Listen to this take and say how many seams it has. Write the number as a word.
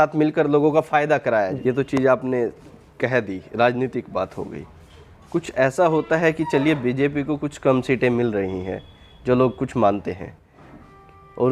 one